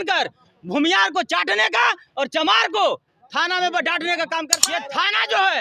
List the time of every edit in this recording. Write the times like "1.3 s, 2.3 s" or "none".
4.6 s